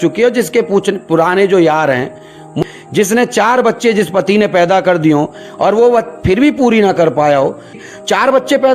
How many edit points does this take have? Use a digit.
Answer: 2